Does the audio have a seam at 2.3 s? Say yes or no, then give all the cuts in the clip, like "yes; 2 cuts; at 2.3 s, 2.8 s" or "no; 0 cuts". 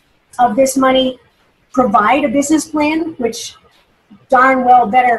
no; 0 cuts